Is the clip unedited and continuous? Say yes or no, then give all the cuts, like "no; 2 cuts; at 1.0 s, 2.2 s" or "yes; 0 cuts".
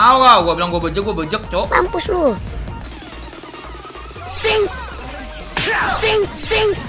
no; 1 cut; at 2.9 s